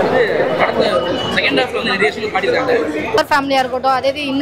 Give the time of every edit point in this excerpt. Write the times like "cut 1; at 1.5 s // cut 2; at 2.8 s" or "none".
cut 1; at 3.2 s